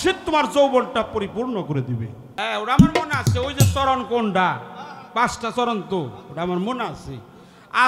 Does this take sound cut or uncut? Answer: cut